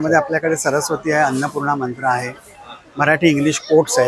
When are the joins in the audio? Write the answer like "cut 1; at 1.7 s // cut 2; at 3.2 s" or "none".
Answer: none